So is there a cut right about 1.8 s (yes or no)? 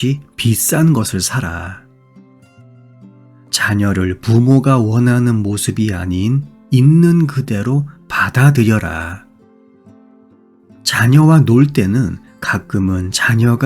yes